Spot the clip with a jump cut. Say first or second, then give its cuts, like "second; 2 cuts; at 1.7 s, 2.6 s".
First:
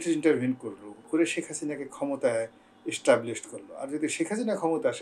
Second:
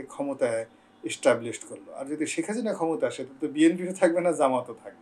first; 1 cut; at 0.9 s